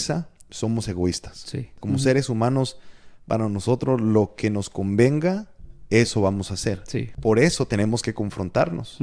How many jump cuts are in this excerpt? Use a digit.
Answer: 2